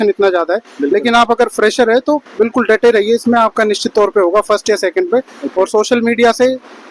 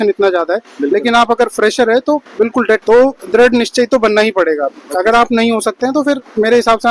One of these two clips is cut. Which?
second; 1 cut; at 2.8 s

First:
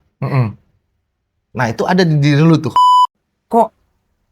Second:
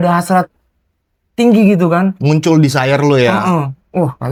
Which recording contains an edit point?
first; 1 cut; at 2.8 s

